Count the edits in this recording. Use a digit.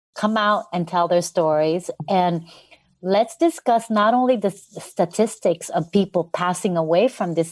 0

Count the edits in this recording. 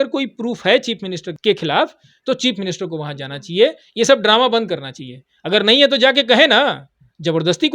1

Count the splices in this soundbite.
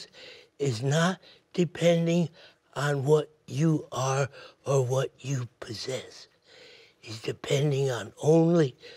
0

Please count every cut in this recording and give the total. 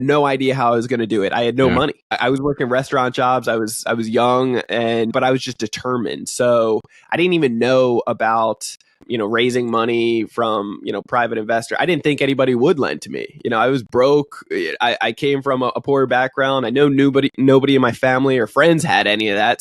3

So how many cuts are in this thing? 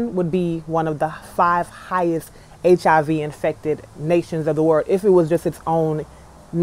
0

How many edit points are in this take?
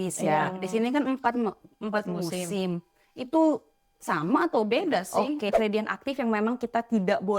1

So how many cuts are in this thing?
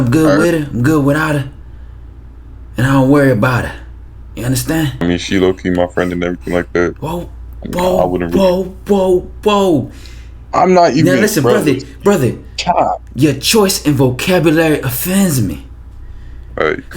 1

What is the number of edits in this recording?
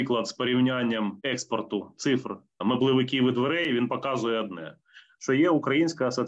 2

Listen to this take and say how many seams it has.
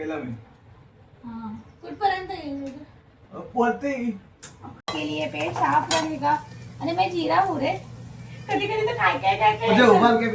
1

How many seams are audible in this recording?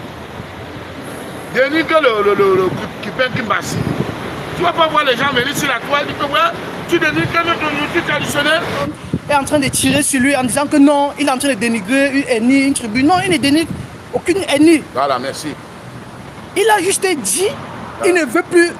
1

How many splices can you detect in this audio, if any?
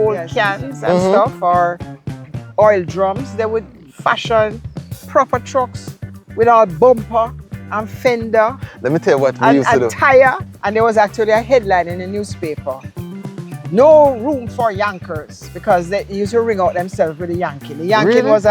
1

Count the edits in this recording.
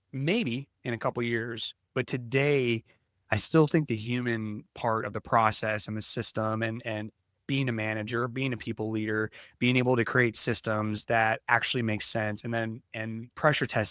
0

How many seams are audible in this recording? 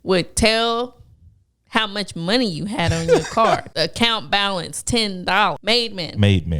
2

